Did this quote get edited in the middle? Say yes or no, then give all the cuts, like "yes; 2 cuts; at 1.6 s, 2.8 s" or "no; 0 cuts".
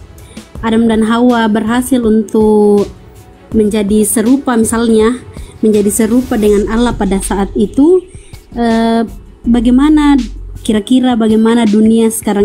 no; 0 cuts